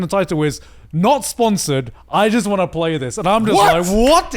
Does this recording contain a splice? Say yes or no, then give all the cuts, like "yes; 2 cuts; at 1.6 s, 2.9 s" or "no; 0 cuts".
no; 0 cuts